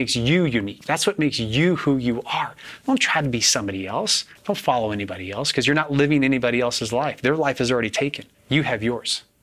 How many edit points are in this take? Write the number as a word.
two